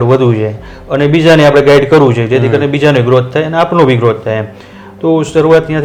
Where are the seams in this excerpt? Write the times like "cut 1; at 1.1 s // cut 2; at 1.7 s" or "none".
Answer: none